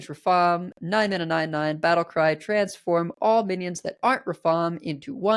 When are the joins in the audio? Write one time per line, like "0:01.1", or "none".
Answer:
none